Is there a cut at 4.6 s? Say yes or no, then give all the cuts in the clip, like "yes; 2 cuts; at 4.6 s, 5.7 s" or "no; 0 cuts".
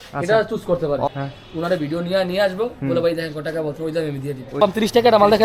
yes; 2 cuts; at 1.1 s, 4.6 s